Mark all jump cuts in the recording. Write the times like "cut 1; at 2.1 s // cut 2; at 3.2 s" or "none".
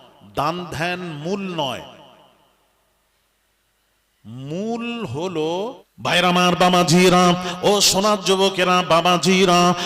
cut 1; at 5.9 s